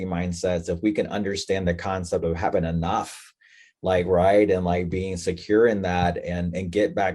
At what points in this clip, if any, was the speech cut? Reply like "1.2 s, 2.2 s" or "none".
none